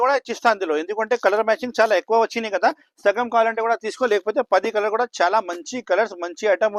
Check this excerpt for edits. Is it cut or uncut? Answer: uncut